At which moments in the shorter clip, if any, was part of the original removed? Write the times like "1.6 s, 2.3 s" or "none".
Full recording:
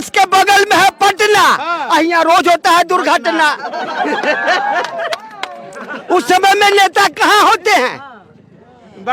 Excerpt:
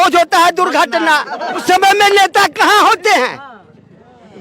1.6 s